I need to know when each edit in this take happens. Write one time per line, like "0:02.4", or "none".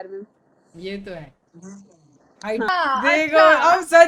0:02.7

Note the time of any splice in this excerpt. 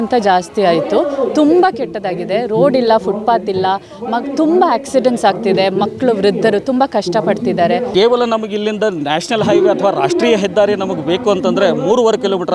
0:07.9

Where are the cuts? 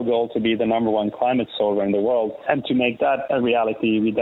none

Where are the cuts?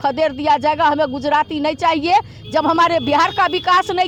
none

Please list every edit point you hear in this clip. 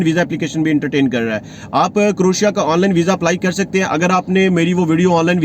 none

